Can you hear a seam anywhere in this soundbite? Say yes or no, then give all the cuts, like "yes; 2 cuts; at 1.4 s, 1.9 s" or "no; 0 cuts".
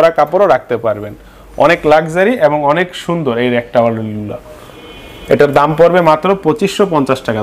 no; 0 cuts